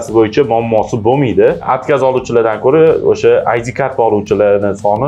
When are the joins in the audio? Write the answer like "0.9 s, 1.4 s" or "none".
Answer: 1.7 s